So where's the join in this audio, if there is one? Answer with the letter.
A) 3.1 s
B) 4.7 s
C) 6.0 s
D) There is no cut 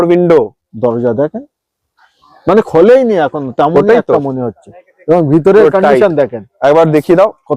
D